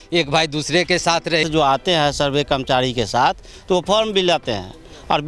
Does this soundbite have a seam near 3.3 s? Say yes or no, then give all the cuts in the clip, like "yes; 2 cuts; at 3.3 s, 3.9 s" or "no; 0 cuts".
no; 1 cut; at 1.4 s